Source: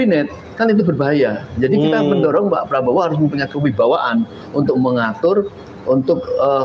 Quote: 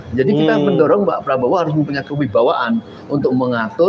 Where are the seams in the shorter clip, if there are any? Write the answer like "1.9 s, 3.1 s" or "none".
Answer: none